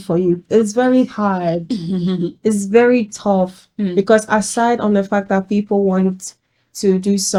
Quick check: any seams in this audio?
no; 0 cuts

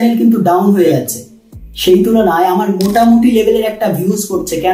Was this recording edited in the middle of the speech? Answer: no; 0 cuts

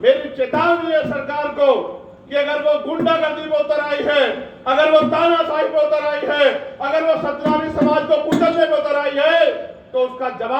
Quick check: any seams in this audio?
no; 0 cuts

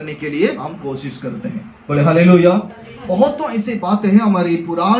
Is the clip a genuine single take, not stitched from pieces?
yes; 0 cuts

